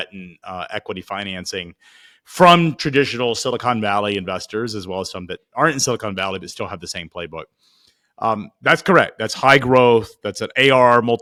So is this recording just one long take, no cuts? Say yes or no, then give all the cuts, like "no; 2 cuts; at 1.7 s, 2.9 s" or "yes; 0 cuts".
yes; 0 cuts